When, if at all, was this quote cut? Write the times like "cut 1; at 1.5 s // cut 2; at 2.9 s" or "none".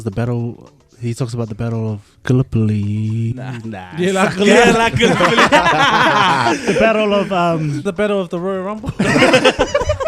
cut 1; at 7.9 s